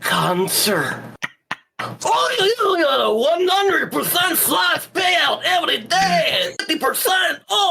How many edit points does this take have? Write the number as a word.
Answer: one